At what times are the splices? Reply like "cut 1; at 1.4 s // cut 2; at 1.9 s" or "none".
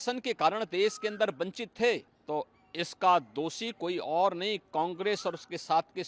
cut 1; at 2.1 s